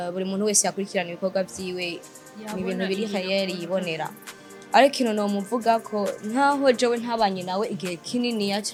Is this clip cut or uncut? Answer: uncut